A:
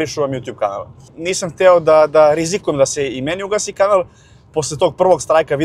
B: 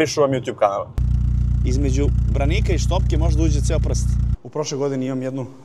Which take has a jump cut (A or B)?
B